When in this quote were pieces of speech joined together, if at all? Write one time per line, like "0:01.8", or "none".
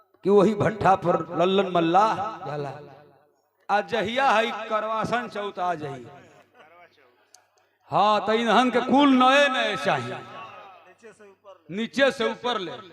0:02.5